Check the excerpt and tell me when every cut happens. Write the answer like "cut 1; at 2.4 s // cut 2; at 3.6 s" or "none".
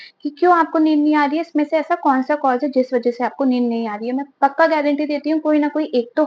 none